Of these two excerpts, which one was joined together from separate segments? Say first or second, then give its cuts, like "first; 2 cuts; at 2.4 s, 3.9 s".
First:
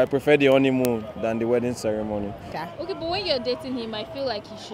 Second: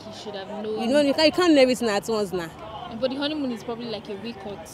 first; 1 cut; at 2.5 s